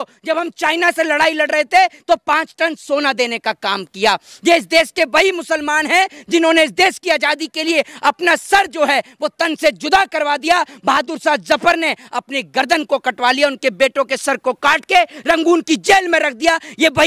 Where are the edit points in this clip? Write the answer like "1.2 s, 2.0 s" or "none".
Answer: none